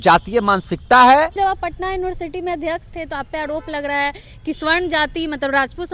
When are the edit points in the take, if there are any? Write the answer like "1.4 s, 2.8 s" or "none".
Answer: 1.4 s